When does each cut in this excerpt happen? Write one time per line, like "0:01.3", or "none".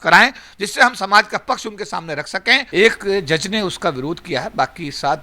0:02.7